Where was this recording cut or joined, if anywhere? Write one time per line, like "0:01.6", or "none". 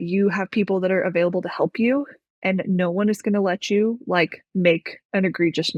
none